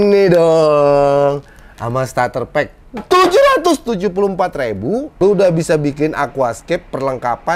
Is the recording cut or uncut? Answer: cut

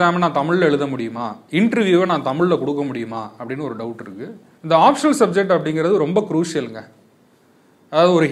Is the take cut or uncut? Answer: cut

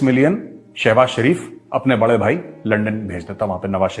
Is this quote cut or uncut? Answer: uncut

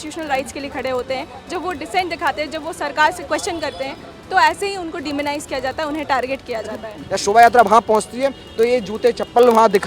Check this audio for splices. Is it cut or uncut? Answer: cut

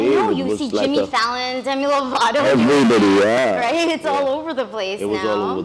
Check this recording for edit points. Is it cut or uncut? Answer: uncut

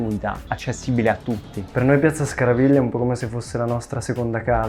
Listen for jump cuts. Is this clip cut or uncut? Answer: cut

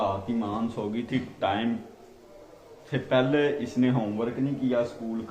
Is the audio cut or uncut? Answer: uncut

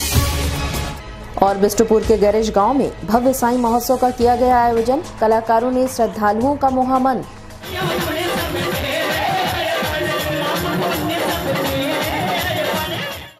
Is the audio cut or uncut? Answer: uncut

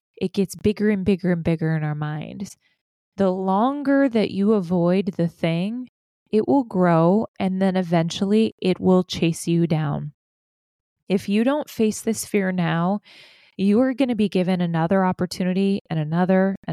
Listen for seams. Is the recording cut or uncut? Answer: cut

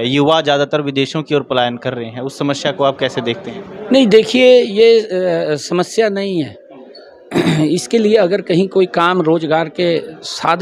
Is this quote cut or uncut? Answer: uncut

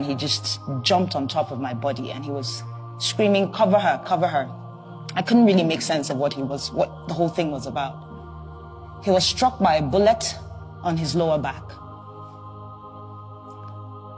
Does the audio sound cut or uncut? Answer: cut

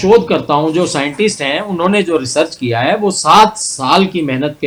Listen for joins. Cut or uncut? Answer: uncut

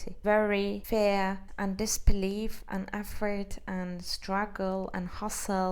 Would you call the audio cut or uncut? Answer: cut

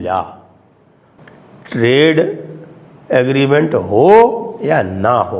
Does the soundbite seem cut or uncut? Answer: uncut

